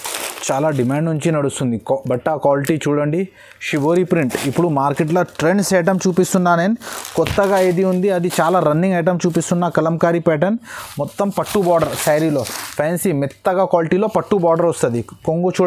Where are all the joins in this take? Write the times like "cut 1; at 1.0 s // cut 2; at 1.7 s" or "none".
none